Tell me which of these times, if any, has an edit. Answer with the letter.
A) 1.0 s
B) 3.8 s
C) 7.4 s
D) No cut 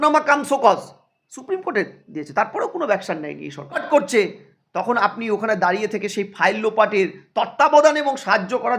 B